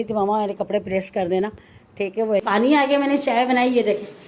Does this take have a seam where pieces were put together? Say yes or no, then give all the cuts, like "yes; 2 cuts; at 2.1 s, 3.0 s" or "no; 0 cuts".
yes; 1 cut; at 2.4 s